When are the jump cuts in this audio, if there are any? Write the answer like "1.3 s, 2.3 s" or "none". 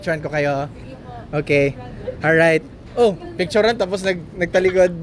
none